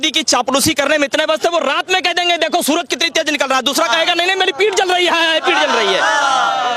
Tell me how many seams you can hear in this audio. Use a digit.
0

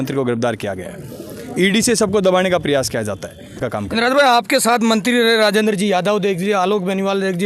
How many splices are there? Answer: 1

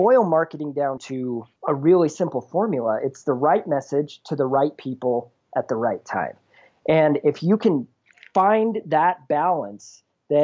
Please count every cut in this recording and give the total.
1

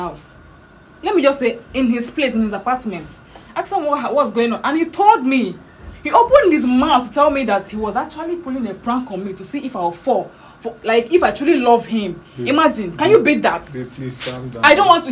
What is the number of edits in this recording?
0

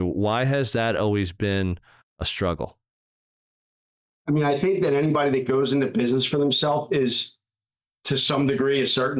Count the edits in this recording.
0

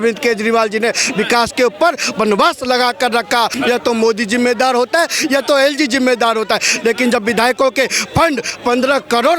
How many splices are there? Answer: 2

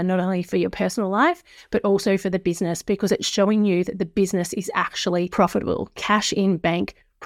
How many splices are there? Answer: 1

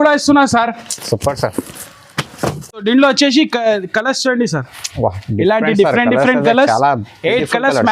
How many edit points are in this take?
1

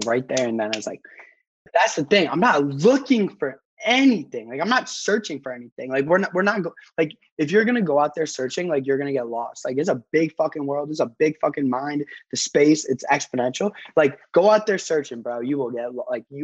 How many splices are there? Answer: 1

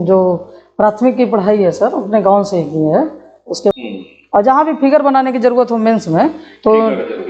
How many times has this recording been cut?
1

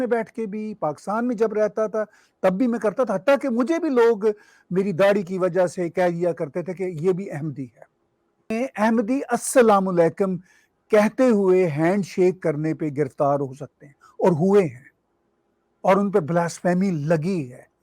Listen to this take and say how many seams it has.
1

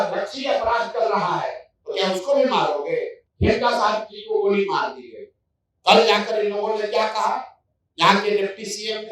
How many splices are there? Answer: 1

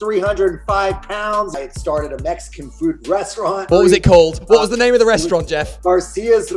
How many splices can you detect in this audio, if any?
2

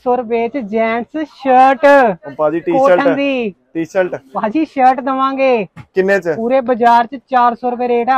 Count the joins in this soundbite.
0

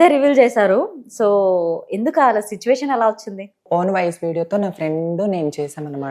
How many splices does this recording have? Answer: 1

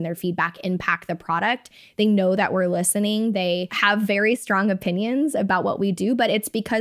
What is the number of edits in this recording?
1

